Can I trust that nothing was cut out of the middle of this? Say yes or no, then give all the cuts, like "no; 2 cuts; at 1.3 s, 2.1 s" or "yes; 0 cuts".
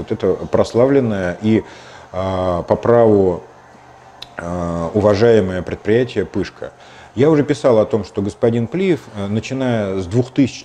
yes; 0 cuts